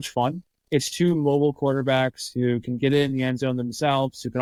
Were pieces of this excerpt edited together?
no; 0 cuts

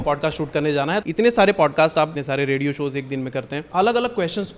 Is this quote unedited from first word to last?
no; 3 cuts; at 1.0 s, 2.2 s, 3.6 s

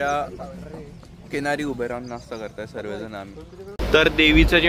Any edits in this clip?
yes; 1 cut; at 3.8 s

